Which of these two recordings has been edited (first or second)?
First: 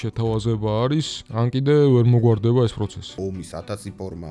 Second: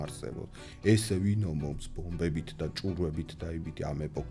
first